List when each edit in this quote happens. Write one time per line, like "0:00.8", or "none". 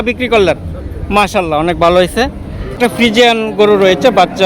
0:02.8